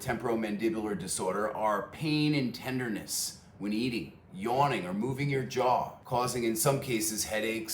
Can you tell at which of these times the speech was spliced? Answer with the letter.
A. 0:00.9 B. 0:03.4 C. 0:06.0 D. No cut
C